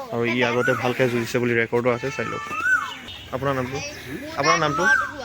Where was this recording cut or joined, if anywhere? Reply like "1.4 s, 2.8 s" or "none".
3.1 s